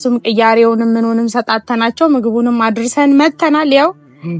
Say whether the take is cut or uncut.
uncut